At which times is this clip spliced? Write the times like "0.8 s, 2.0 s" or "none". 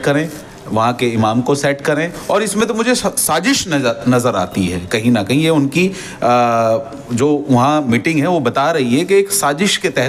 none